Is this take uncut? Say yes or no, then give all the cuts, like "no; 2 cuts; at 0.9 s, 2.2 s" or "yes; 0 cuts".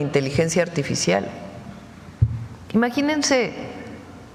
yes; 0 cuts